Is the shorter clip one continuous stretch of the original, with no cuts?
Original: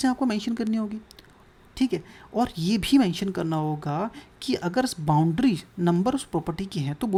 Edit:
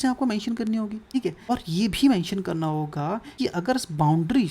no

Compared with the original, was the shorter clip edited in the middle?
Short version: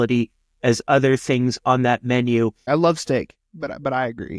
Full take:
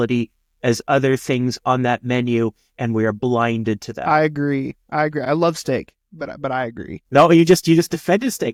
yes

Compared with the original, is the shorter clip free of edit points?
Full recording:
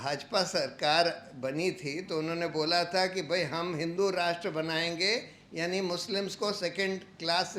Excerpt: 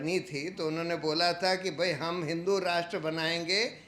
yes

